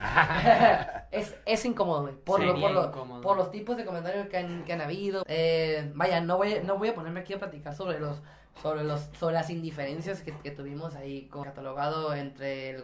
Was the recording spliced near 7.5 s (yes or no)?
no